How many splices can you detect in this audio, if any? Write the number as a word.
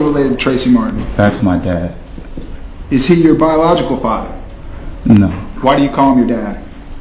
one